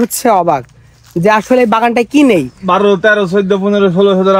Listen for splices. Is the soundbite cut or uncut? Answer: cut